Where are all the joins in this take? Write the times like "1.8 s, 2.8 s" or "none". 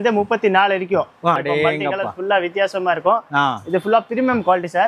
1.4 s